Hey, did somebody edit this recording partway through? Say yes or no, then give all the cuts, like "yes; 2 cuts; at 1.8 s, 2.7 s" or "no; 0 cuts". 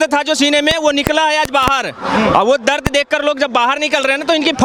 no; 0 cuts